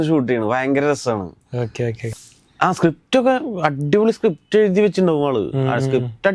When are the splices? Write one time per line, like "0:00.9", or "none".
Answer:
0:02.0